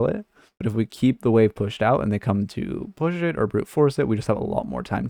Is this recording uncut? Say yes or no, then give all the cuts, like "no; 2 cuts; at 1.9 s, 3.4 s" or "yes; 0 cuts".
yes; 0 cuts